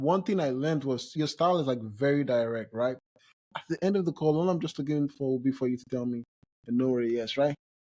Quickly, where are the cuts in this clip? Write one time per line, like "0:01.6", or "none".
0:01.1
0:03.4